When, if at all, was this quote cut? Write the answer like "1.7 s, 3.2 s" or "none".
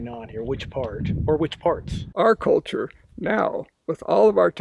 2.0 s